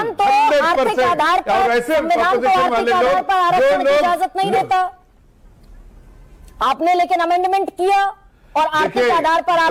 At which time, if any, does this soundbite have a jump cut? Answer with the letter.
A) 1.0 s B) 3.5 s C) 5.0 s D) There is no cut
D